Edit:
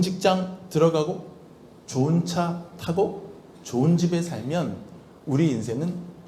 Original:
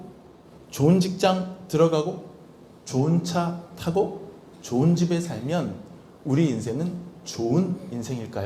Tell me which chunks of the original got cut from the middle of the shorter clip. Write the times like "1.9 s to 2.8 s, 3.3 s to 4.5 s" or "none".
none